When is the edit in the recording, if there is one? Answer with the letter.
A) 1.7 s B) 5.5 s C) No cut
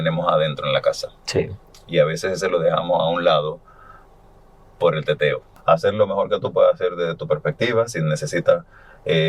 B